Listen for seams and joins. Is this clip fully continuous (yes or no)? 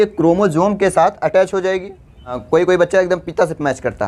no